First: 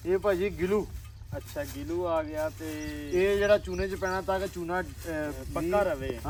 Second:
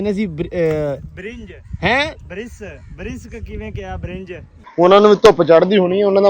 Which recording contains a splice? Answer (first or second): second